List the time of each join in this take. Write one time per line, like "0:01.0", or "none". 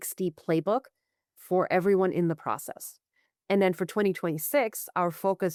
none